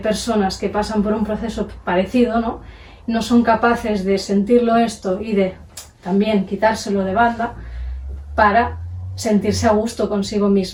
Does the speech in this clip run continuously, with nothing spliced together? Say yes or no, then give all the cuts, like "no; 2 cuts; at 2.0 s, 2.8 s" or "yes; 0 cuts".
yes; 0 cuts